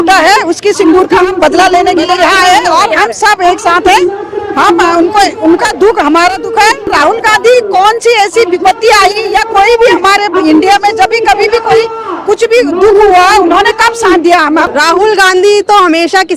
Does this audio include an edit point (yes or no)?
yes